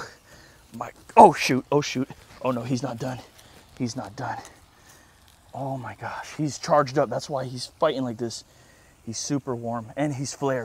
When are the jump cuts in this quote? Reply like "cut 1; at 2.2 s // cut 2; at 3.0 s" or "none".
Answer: none